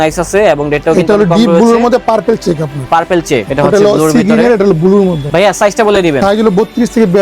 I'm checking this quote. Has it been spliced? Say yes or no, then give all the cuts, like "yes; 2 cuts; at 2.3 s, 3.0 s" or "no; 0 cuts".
no; 0 cuts